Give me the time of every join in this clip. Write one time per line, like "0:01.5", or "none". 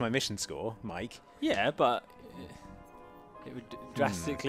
none